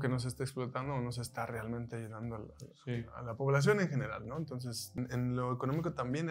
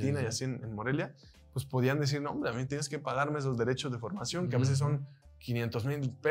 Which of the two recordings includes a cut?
first; 1 cut; at 4.9 s

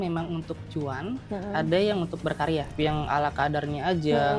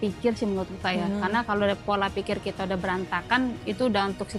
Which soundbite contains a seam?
first; 1 cut; at 2.7 s

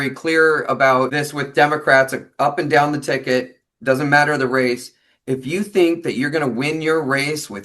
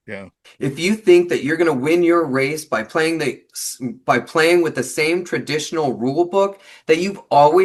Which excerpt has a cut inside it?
first; 1 cut; at 1.2 s

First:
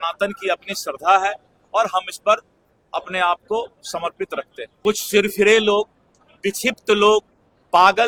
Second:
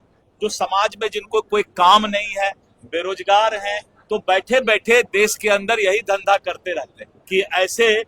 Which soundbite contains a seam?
second; 1 cut; at 7.1 s

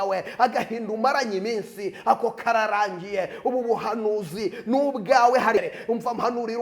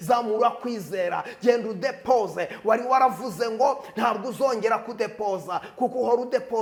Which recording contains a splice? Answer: first; 1 cut; at 5.6 s

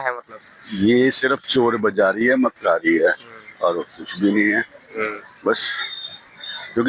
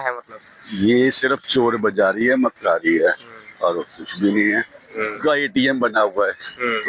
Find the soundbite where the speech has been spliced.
second; 1 cut; at 5.2 s

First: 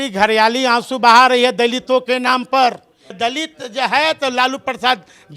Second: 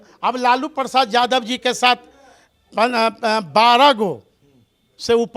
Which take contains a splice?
first; 1 cut; at 3.1 s

